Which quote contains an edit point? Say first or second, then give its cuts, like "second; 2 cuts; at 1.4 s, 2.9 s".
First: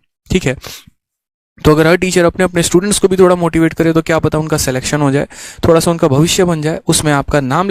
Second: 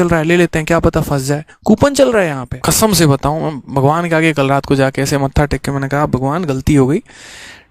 second; 1 cut; at 2.5 s